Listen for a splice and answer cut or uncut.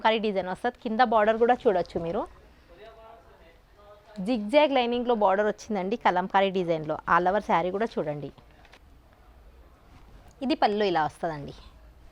uncut